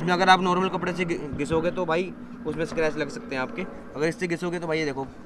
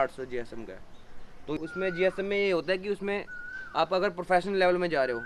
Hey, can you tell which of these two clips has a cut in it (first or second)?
second